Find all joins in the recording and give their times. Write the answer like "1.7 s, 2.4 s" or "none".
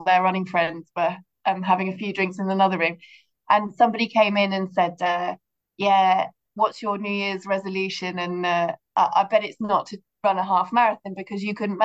none